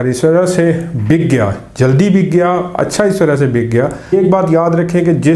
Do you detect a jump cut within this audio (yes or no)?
yes